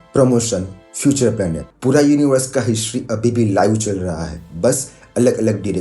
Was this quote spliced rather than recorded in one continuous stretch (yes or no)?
yes